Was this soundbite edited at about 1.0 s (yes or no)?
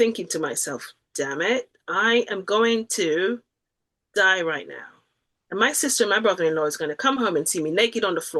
no